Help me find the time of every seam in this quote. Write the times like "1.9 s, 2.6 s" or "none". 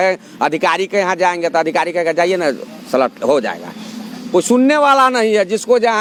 none